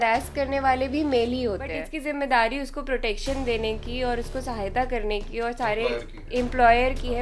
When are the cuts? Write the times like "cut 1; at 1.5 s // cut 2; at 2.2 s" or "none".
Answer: cut 1; at 1.9 s